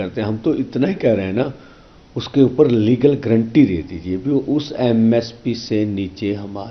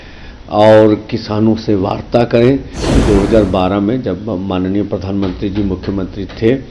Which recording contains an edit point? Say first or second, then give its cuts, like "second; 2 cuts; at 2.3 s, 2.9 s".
second; 1 cut; at 3.0 s